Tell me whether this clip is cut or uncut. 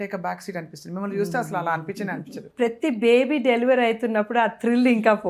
cut